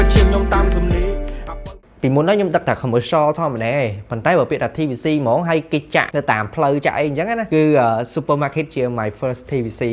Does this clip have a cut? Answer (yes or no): yes